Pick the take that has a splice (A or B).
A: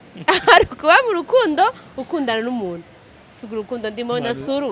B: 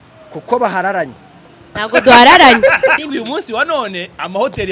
B